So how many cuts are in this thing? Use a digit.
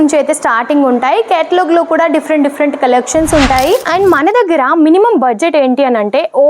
1